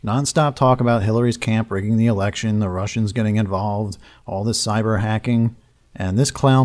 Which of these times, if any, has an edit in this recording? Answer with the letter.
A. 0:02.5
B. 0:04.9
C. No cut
C